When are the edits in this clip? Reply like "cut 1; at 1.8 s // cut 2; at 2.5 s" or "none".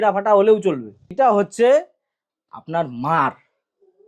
cut 1; at 1.1 s